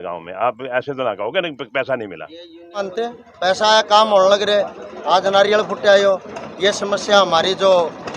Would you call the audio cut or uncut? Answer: cut